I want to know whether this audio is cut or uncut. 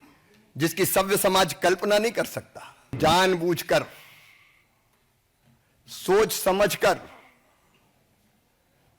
cut